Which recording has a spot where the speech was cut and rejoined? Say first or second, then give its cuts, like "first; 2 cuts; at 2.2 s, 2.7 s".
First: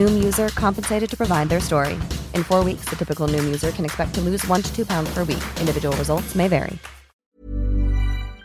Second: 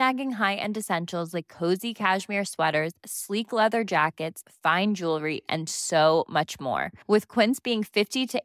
first; 1 cut; at 7.4 s